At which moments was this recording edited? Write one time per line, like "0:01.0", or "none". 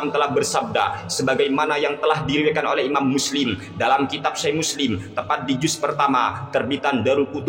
none